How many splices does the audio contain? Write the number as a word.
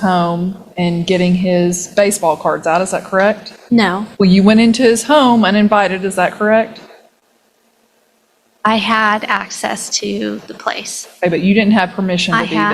one